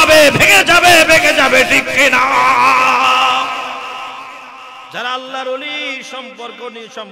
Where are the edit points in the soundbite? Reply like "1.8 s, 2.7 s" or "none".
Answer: none